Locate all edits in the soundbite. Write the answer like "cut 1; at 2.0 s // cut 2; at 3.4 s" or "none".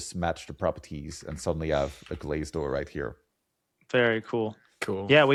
none